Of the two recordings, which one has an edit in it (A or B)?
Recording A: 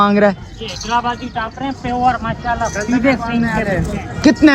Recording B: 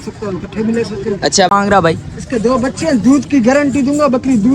B